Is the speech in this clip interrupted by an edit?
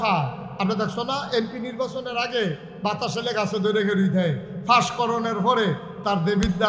no; 0 cuts

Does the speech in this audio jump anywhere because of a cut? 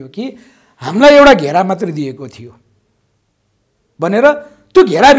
no; 0 cuts

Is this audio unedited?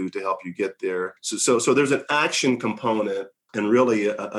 yes; 0 cuts

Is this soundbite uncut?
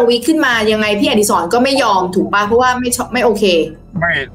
yes; 0 cuts

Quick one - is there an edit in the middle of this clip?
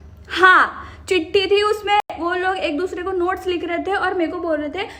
no; 0 cuts

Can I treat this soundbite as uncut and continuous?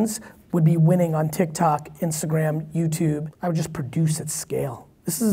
no; 1 cut; at 3.3 s

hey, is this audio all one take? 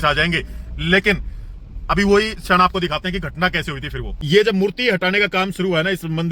no; 1 cut; at 4.1 s

